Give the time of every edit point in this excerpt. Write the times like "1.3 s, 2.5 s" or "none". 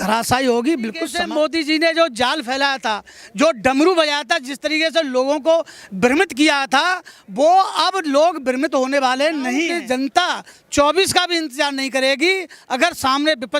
1.1 s, 9.7 s